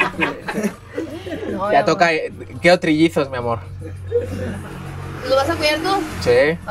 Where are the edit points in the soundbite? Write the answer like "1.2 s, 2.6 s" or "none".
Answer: none